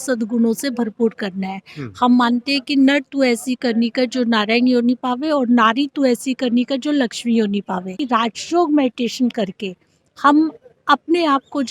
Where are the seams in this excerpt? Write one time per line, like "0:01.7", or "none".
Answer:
0:08.0